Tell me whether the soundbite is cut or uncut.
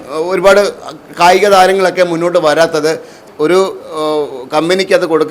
cut